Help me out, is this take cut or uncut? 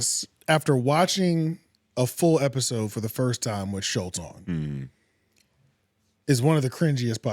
uncut